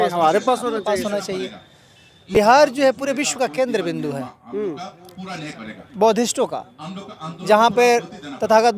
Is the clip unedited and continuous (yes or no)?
no